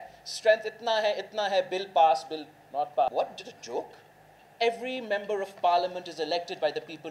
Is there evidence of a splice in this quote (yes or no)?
yes